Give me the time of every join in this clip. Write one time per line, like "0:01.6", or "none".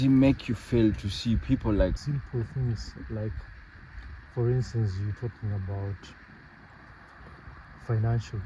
0:02.0